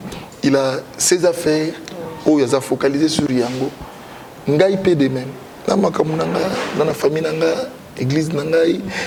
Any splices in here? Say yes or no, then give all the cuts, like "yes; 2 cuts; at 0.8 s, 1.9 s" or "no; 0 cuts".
no; 0 cuts